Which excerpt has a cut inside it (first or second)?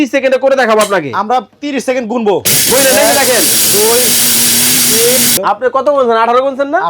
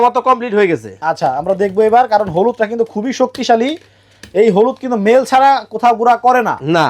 first